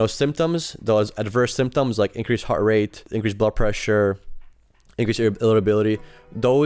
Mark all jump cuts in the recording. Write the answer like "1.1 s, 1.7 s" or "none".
3.0 s